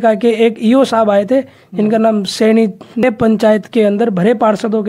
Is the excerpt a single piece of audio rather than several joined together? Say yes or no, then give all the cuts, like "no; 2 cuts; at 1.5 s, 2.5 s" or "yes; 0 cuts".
no; 1 cut; at 3.0 s